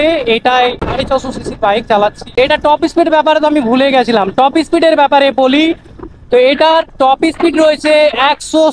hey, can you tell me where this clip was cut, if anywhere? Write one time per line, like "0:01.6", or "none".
0:00.8
0:02.4